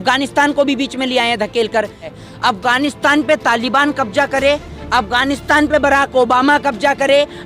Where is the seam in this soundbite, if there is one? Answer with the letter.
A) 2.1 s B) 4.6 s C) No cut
A